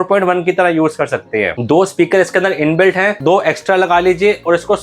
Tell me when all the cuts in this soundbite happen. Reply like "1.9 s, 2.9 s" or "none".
1.6 s, 3.1 s